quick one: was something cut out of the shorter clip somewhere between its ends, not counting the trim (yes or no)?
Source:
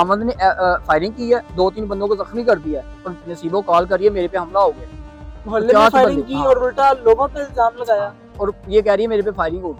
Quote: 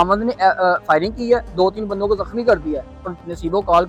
no